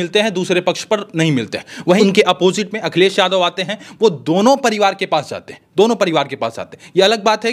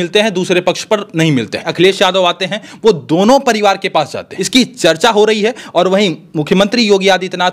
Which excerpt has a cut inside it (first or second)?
second